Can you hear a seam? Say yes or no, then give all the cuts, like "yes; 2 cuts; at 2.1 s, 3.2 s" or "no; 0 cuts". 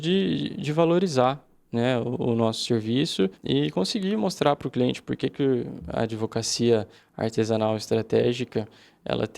yes; 1 cut; at 3.4 s